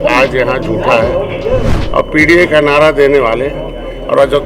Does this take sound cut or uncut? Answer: cut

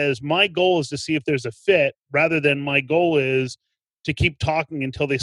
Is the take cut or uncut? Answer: uncut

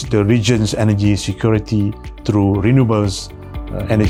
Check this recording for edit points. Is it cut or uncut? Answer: uncut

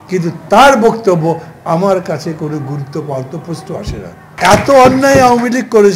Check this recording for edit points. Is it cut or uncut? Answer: cut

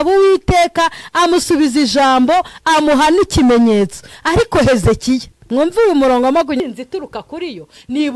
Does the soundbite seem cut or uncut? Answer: cut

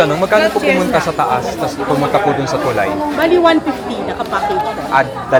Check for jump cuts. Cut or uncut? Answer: uncut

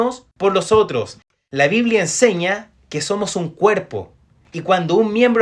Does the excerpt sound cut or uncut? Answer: cut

